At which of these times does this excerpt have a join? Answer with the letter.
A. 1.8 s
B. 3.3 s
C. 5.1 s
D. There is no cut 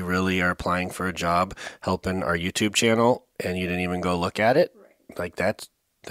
D